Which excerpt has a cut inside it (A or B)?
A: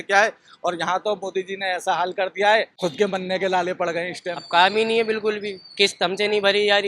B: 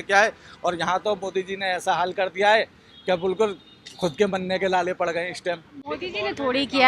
A